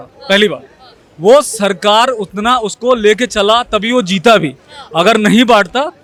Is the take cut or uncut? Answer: uncut